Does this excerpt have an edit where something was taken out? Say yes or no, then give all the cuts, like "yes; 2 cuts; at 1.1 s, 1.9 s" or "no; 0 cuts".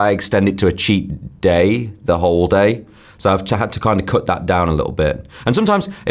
no; 0 cuts